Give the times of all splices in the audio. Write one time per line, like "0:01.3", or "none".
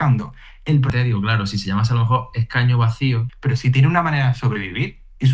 0:00.9
0:03.3